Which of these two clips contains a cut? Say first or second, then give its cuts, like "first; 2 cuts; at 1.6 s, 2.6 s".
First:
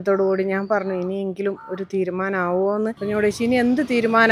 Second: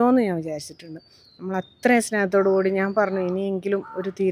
first; 1 cut; at 3.0 s